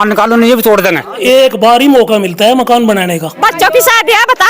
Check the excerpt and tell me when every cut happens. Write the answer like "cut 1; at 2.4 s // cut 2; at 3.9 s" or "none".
cut 1; at 1.2 s // cut 2; at 3.3 s

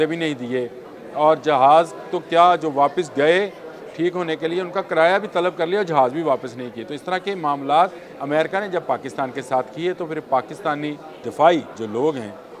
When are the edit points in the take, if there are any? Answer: cut 1; at 8.1 s // cut 2; at 11.1 s // cut 3; at 11.8 s

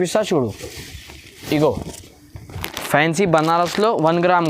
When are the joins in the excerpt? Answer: cut 1; at 2.5 s

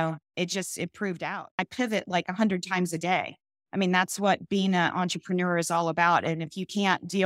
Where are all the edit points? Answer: cut 1; at 1.6 s

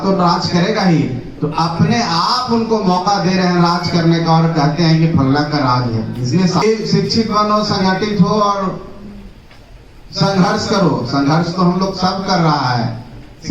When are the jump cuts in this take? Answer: cut 1; at 6.6 s

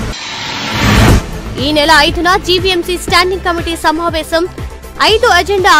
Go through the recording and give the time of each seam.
cut 1; at 1.1 s

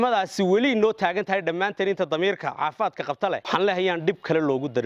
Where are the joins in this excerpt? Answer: cut 1; at 3.4 s

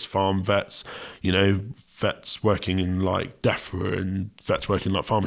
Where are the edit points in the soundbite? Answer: cut 1; at 1.7 s

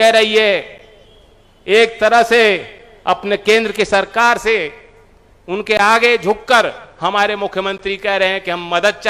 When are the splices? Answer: none

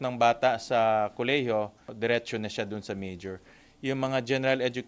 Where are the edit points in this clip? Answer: cut 1; at 1.8 s

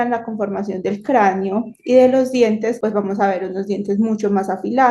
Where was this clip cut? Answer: cut 1; at 2.8 s

